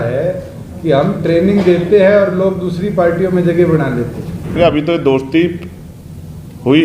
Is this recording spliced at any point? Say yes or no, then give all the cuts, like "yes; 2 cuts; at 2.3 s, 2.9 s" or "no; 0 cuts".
yes; 1 cut; at 4.6 s